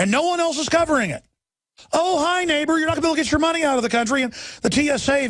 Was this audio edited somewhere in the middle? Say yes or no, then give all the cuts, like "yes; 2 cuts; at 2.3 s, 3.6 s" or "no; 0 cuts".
yes; 1 cut; at 1.8 s